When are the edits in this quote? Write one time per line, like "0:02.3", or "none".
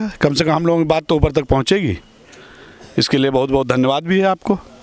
none

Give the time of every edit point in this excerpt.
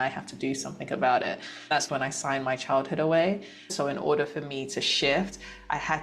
0:03.7

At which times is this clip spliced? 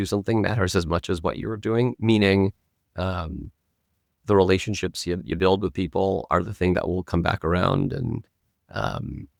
none

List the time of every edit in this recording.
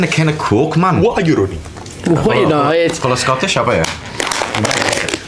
none

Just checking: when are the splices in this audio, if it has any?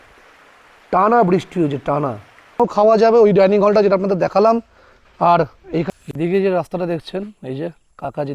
0:02.6
0:05.9

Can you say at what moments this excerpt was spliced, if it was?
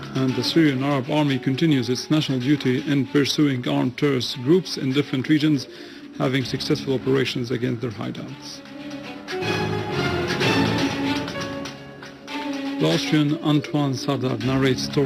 0:02.0

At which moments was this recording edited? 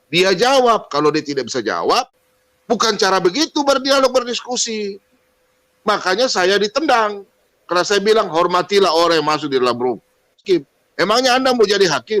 0:02.1
0:10.4

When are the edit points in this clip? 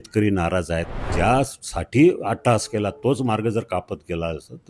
0:01.0

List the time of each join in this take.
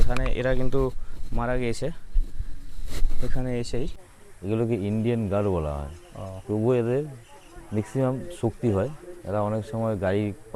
0:04.0

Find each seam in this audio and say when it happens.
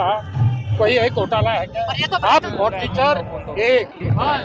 0:02.5

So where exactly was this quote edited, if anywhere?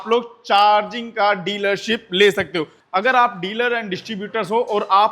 0:02.8

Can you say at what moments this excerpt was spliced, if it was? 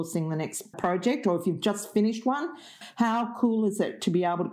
0:00.8
0:02.8

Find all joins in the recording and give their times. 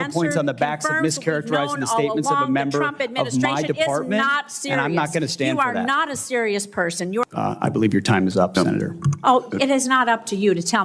0:07.2

